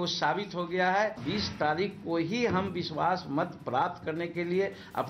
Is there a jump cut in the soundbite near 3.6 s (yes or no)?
no